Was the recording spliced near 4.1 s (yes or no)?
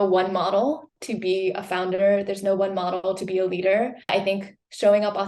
yes